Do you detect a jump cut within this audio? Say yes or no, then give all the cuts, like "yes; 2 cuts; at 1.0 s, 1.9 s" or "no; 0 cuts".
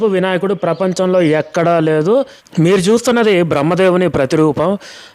yes; 1 cut; at 2.4 s